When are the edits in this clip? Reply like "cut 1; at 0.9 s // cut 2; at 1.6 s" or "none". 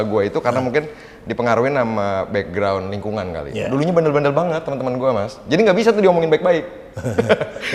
none